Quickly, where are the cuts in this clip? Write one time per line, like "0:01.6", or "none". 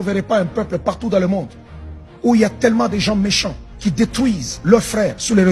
none